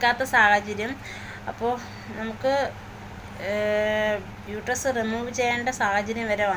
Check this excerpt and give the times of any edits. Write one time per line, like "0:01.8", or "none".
none